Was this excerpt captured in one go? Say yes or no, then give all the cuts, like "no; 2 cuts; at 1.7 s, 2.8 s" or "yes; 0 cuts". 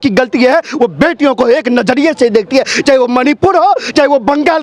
yes; 0 cuts